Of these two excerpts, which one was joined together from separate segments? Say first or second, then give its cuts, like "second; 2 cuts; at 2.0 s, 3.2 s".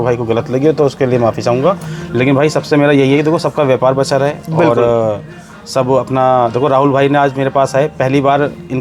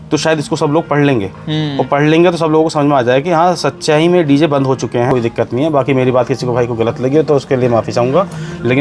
second; 1 cut; at 5.1 s